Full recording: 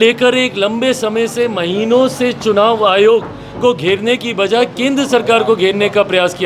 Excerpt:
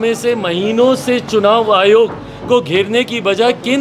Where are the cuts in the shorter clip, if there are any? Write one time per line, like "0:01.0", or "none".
none